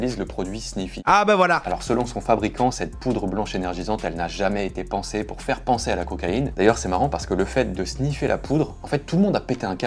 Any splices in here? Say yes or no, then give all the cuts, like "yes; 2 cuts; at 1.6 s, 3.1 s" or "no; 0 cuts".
yes; 3 cuts; at 1.0 s, 1.6 s, 6.5 s